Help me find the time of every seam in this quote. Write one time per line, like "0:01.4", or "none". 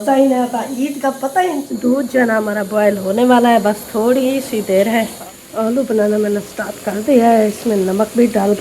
0:01.7
0:05.2

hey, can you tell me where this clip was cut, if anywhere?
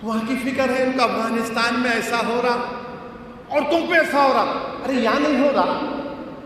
none

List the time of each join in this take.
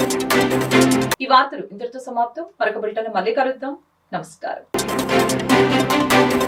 none

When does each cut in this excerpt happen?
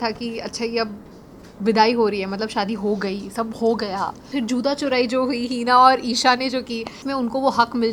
0:04.3
0:07.0

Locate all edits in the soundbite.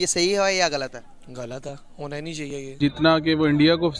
0:02.8

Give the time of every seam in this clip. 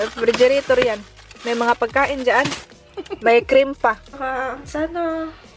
0:04.1

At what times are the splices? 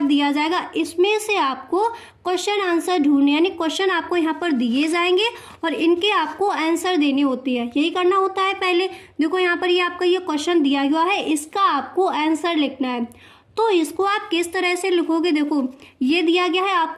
none

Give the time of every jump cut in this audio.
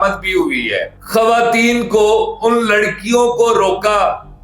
0:00.9

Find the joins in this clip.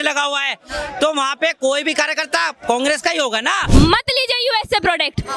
0:03.6

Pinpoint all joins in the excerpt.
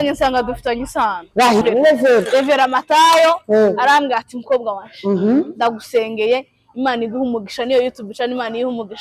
0:01.6

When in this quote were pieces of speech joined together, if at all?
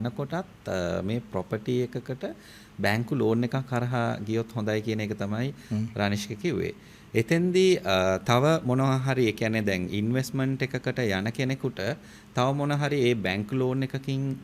none

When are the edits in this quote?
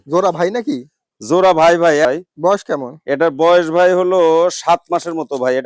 0:02.0

